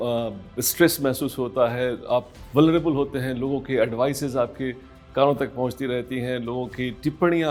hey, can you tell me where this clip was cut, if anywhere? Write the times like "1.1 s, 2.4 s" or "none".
none